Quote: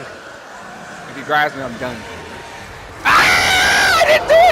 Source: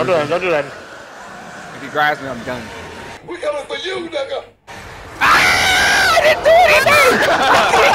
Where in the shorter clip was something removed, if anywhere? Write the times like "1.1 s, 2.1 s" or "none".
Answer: 2.4 s